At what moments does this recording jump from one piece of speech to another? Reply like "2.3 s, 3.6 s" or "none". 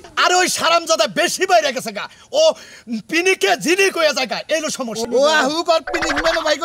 none